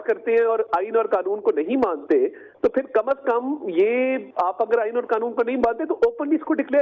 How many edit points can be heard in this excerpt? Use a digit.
0